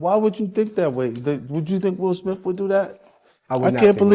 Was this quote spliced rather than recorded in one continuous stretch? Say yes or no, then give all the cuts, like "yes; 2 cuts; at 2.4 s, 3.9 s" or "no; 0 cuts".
no; 0 cuts